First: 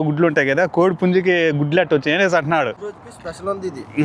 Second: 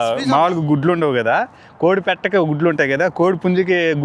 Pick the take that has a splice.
first; 1 cut; at 2.7 s

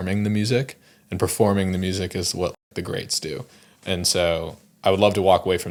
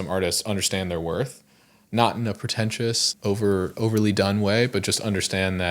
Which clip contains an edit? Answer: second; 1 cut; at 3.1 s

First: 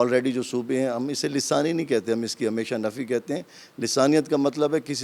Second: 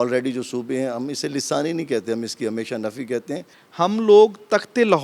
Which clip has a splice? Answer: second; 1 cut; at 3.6 s

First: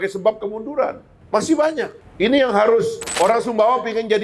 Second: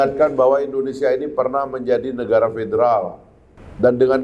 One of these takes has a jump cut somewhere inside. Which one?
first; 3 cuts; at 1.1 s, 2.0 s, 3.0 s

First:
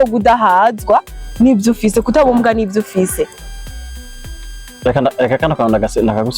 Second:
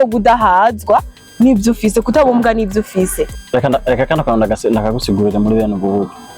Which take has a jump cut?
second; 1 cut; at 3.4 s

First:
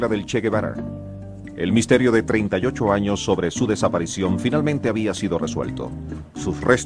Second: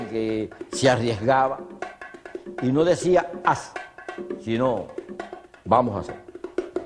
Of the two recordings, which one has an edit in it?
first; 1 cut; at 5.2 s

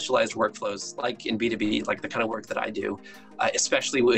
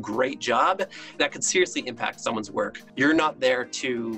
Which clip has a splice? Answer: second; 2 cuts; at 1.1 s, 2.8 s

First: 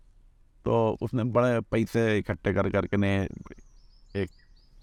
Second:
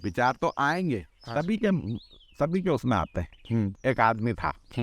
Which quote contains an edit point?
second; 1 cut; at 3.7 s

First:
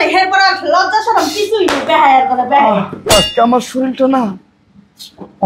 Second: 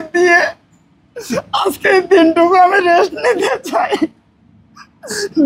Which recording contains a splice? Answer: first; 1 cut; at 3.1 s

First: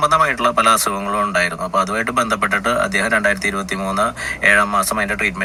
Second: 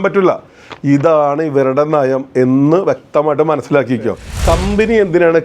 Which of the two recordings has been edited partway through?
second; 1 cut; at 4.3 s

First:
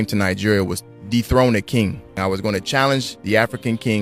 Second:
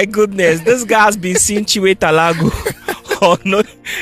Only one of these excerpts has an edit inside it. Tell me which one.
first; 2 cuts; at 2.2 s, 3.1 s

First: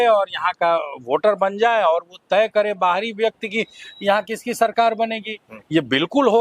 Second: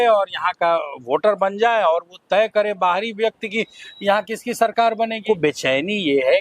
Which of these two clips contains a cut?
second; 1 cut; at 5.2 s

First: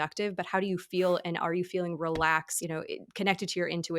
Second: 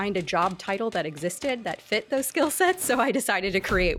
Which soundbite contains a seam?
first; 1 cut; at 2.5 s

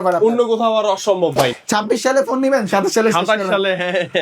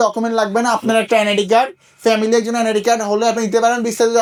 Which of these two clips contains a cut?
first; 1 cut; at 1.5 s

